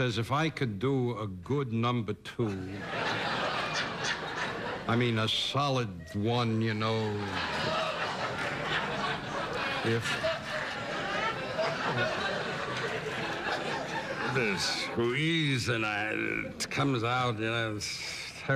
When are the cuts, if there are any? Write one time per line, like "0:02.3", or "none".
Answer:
0:13.1